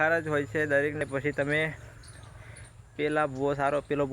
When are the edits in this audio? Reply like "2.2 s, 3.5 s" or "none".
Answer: 1.1 s